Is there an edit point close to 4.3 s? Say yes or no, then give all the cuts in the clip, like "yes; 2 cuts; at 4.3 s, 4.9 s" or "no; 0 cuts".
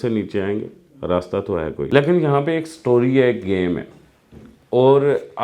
no; 1 cut; at 1.9 s